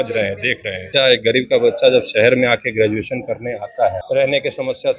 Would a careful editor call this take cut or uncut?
cut